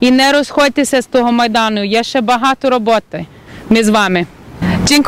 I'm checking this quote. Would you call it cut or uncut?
uncut